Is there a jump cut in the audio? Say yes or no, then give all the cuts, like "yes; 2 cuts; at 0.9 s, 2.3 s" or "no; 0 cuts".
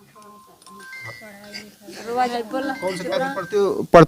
no; 0 cuts